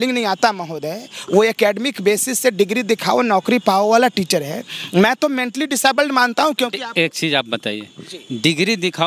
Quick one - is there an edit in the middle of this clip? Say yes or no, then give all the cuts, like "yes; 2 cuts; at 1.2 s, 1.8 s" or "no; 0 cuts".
no; 0 cuts